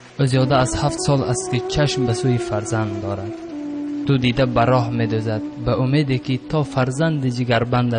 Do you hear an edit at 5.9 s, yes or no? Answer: no